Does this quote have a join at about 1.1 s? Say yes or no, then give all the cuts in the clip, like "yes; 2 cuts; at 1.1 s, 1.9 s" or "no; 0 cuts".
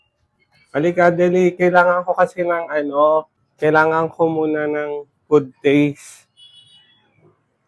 no; 1 cut; at 3.4 s